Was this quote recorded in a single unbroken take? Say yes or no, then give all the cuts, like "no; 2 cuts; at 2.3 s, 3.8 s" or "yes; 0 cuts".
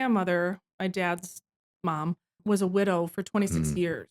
no; 1 cut; at 2.4 s